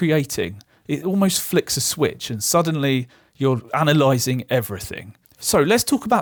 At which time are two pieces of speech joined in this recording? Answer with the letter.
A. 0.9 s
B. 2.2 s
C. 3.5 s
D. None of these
D